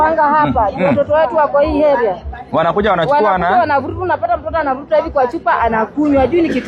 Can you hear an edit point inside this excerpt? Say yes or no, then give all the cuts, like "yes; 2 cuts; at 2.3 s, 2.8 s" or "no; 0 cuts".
no; 0 cuts